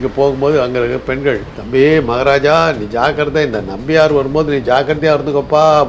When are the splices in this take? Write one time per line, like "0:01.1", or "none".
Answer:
none